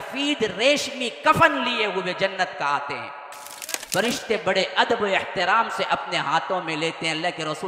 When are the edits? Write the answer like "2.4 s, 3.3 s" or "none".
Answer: 3.7 s